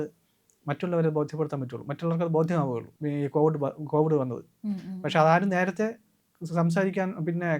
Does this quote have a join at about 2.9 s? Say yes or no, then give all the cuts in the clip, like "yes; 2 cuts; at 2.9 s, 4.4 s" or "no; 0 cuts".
yes; 1 cut; at 2.9 s